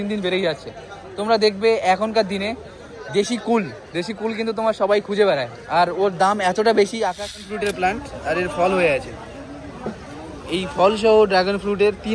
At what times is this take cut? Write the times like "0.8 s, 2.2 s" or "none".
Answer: 7.4 s